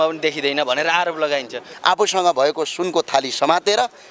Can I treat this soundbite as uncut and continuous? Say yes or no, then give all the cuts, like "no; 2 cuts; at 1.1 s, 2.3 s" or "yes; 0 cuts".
no; 1 cut; at 1.6 s